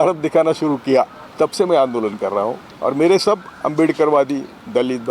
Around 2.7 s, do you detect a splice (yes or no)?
yes